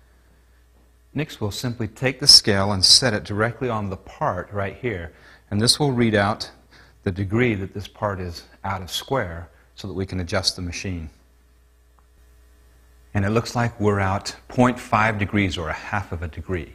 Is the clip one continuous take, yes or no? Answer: yes